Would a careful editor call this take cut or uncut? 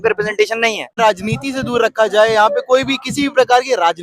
cut